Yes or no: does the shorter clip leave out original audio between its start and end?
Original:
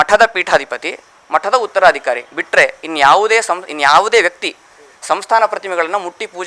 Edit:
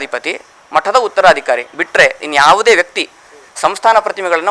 yes